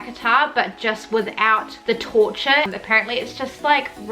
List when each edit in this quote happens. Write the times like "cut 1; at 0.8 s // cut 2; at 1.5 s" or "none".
cut 1; at 2.7 s